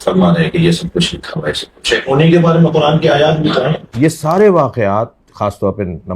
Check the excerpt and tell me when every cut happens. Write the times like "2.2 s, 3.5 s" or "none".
3.8 s